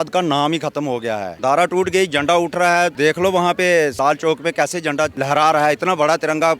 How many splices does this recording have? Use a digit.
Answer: 4